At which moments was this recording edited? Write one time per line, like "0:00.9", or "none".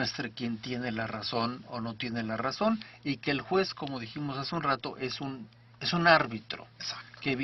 0:04.3

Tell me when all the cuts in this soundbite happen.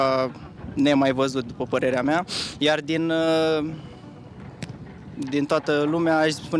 none

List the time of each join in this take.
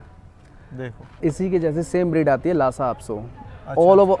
0:01.0

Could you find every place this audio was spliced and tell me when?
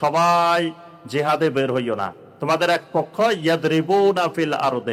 none

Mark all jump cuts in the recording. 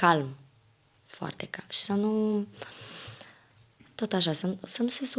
none

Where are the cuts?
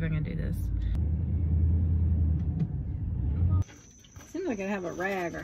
0:00.9
0:03.6

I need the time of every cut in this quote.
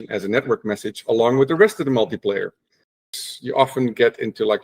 0:03.0

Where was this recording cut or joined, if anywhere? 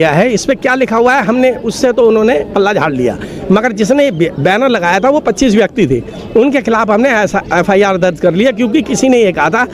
none

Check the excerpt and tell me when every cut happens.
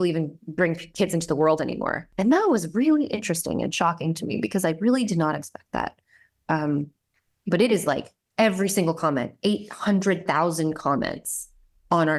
0:02.0

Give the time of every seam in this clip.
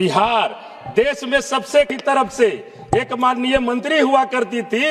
0:01.9

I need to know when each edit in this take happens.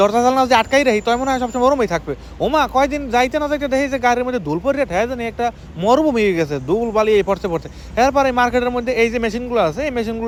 none

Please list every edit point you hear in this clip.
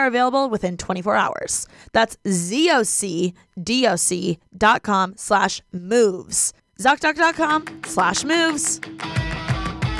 0:08.7

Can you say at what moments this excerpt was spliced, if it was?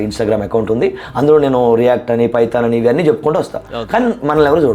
none

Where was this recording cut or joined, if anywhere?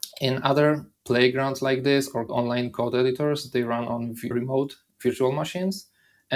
0:00.9
0:02.3
0:04.3

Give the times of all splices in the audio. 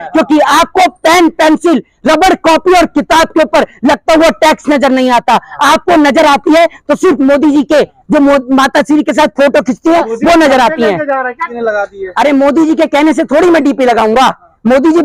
0:11.5

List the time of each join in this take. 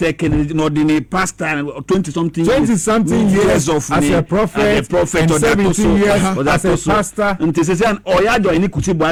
none

